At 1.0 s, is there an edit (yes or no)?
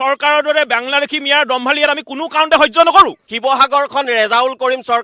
no